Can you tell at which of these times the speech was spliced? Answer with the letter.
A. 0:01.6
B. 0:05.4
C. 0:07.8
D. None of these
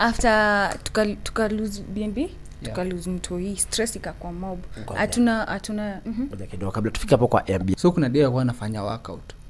C